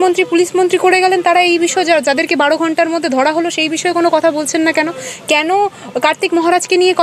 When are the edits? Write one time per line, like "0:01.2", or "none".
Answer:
none